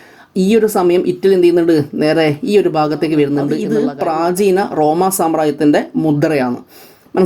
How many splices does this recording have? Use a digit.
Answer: 1